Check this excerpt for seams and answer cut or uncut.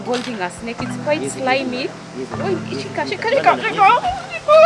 uncut